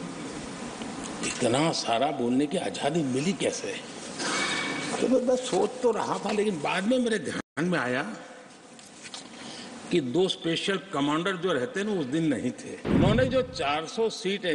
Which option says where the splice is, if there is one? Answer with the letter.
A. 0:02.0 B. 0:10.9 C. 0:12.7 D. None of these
C